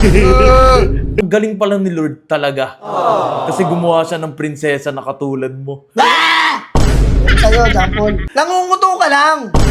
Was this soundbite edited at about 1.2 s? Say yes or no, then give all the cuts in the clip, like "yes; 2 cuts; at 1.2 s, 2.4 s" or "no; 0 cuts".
yes; 2 cuts; at 1.2 s, 8.2 s